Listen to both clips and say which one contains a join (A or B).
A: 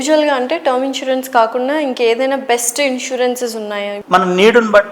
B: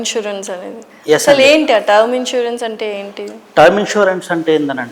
A